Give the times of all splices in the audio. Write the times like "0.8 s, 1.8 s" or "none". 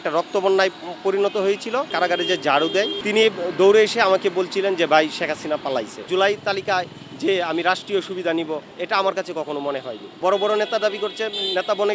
1.9 s, 3.0 s, 6.0 s, 10.1 s

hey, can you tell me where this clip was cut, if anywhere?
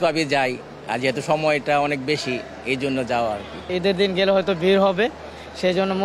none

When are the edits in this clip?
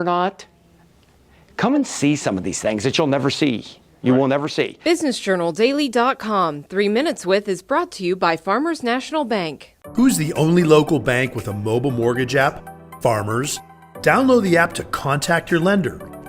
4.8 s

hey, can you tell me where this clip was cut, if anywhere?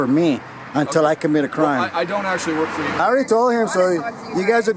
3.0 s

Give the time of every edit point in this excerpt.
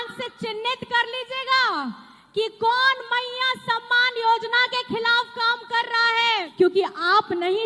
6.5 s

